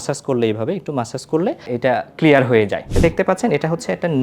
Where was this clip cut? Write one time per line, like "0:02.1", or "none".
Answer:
0:01.7
0:02.9